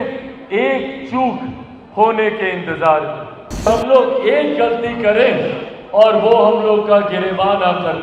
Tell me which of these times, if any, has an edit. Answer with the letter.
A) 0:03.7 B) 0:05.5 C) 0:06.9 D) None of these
A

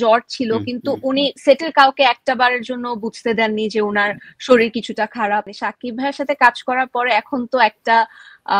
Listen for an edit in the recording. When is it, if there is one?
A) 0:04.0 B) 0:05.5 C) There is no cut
B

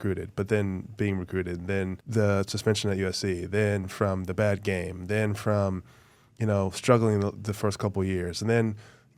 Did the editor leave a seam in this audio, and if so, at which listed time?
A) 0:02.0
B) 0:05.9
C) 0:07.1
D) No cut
A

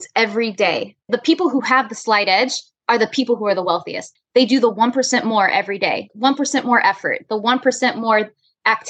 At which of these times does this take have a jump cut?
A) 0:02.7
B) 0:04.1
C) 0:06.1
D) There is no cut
C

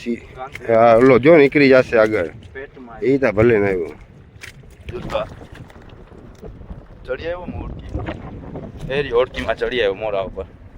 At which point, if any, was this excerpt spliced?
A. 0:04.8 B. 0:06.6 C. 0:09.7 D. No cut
A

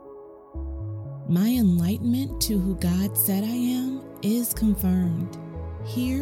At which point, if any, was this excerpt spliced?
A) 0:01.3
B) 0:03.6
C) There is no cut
A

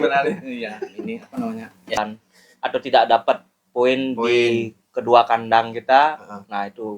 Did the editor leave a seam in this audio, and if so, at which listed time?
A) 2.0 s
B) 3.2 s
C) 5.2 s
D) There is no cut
A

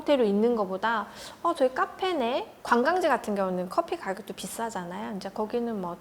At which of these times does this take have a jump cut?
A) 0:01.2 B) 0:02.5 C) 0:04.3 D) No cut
B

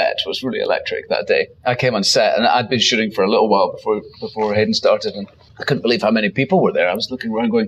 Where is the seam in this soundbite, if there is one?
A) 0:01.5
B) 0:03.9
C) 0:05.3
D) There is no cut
A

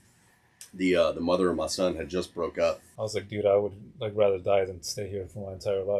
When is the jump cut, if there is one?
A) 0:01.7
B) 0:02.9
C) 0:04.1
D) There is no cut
B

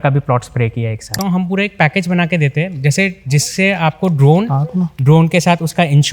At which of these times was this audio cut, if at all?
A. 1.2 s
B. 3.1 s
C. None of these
A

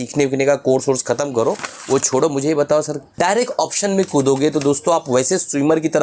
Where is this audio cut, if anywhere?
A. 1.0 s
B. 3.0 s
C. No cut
B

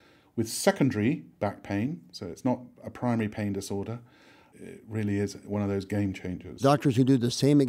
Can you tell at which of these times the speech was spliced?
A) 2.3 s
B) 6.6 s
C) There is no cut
B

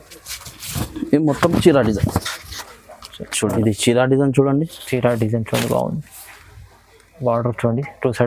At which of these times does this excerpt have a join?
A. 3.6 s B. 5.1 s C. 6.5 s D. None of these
A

